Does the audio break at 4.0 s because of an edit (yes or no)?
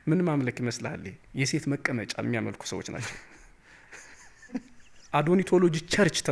no